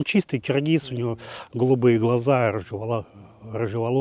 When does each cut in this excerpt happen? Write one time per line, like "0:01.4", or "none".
none